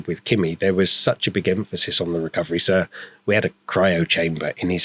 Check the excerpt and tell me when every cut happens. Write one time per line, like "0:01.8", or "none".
none